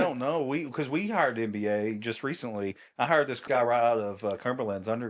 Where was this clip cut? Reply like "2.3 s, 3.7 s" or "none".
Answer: 3.4 s